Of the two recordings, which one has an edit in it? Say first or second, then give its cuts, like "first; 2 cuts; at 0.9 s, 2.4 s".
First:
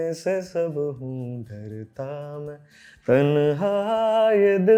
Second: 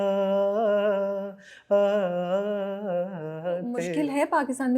second; 1 cut; at 3.8 s